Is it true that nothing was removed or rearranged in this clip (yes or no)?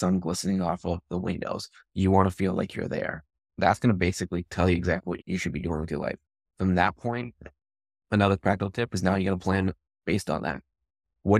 no